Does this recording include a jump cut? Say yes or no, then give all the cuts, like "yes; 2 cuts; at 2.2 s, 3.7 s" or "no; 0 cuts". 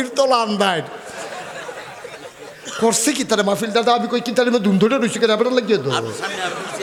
no; 0 cuts